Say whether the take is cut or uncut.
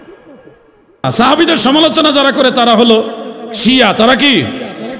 cut